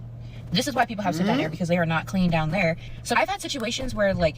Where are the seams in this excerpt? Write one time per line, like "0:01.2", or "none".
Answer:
0:02.9